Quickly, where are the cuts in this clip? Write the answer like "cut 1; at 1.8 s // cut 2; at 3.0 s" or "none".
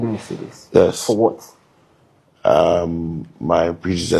none